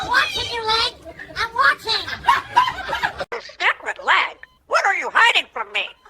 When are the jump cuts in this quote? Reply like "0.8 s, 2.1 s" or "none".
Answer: 3.3 s